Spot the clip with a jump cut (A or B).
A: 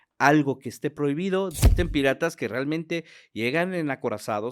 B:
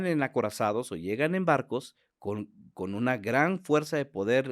A